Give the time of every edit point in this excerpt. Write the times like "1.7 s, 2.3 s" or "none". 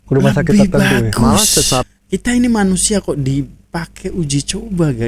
1.8 s